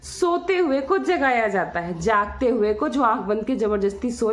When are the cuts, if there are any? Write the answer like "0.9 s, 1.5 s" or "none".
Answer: none